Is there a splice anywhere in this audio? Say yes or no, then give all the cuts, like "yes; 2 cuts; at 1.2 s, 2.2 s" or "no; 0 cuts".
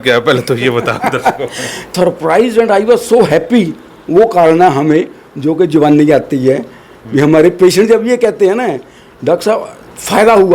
yes; 1 cut; at 1.9 s